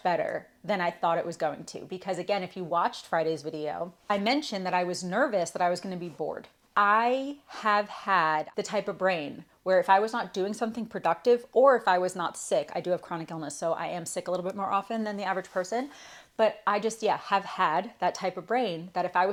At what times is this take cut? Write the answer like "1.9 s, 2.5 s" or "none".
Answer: none